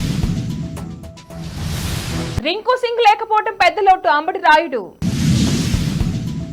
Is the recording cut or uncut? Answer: cut